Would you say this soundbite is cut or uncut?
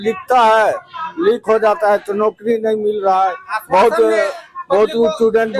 uncut